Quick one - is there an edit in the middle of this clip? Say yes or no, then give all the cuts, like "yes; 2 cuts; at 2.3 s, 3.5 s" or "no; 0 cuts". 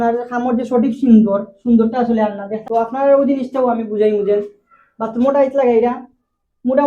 yes; 1 cut; at 2.6 s